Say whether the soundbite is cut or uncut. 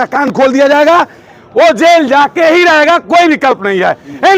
uncut